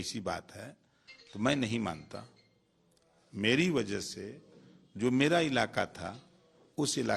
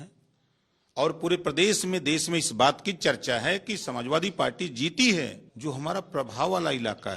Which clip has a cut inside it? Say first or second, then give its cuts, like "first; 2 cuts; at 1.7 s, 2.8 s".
second; 1 cut; at 5.4 s